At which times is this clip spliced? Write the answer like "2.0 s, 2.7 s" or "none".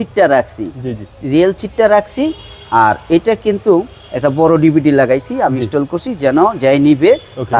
none